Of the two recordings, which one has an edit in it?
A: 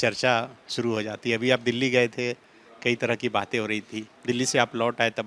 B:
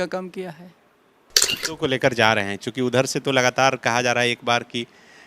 B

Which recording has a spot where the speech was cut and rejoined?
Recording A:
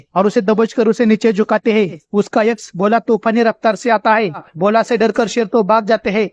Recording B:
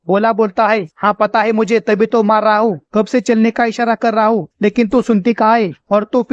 A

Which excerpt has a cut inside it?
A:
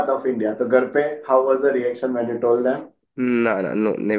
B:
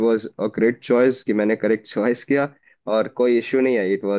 A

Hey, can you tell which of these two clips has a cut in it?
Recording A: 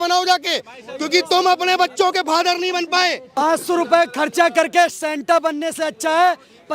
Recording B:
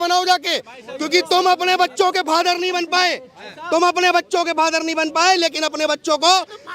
A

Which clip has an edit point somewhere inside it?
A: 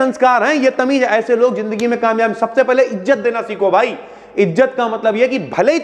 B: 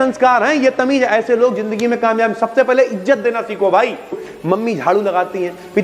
B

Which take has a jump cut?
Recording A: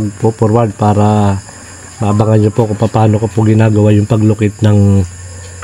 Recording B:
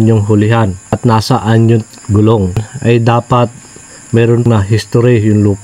B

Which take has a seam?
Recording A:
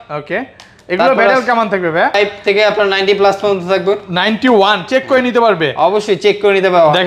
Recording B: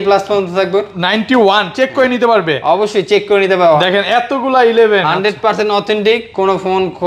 A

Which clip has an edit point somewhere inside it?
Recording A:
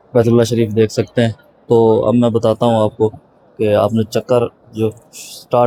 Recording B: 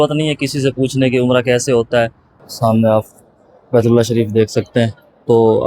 B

